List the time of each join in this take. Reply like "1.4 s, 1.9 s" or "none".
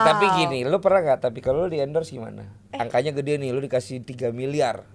2.6 s